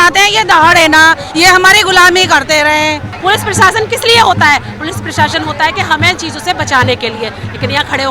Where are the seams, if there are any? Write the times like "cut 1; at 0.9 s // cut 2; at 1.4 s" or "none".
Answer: cut 1; at 3.1 s